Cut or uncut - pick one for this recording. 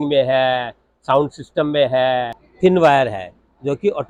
cut